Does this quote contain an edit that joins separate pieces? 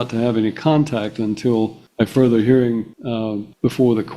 yes; 2 cuts; at 1.8 s, 3.2 s

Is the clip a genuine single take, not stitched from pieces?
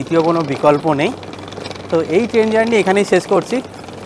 yes; 0 cuts

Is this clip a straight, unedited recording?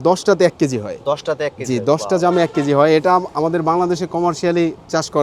yes; 0 cuts

